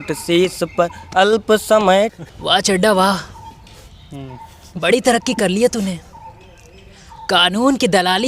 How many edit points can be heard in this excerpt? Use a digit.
1